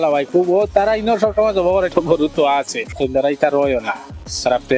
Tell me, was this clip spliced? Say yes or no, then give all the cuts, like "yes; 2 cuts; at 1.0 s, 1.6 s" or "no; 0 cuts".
yes; 2 cuts; at 1.9 s, 3.0 s